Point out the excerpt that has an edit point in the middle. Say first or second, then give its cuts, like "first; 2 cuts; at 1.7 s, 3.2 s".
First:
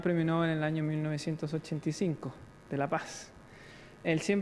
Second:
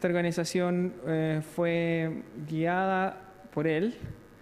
second; 1 cut; at 2.3 s